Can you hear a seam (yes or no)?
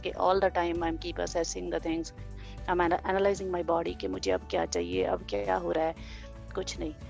no